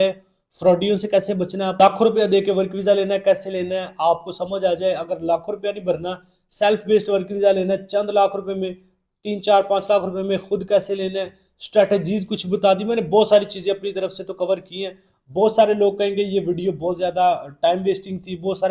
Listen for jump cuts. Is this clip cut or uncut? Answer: cut